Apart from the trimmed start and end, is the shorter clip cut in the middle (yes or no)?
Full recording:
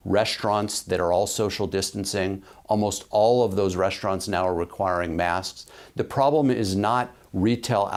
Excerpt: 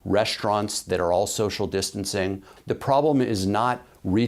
yes